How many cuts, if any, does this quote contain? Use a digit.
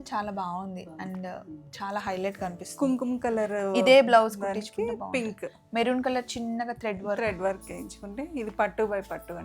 0